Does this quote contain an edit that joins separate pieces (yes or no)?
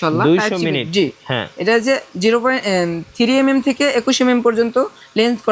no